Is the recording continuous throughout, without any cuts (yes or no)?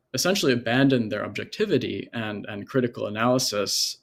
yes